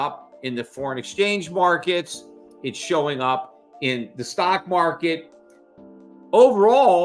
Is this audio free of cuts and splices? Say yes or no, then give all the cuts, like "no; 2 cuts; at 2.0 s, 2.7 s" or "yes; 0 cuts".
yes; 0 cuts